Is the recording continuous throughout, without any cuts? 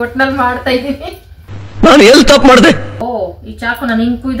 no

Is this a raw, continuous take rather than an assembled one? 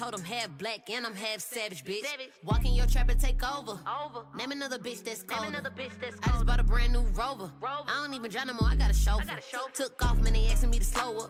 yes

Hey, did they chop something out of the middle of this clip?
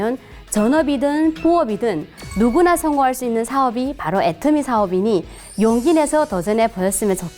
no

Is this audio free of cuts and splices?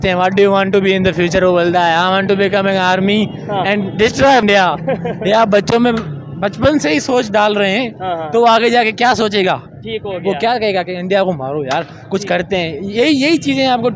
no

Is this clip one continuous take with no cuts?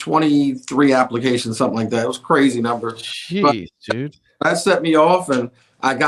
yes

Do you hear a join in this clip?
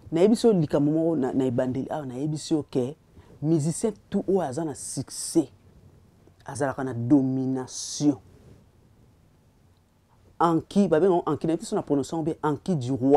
no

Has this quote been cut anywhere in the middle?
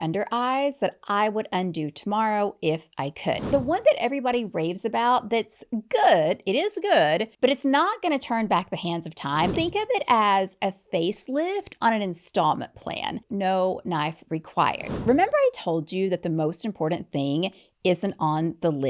yes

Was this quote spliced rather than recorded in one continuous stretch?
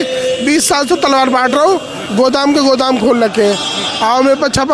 no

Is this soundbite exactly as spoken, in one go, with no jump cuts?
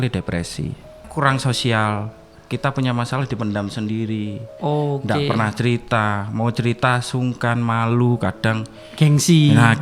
no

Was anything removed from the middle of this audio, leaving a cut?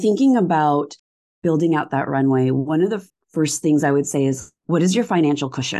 yes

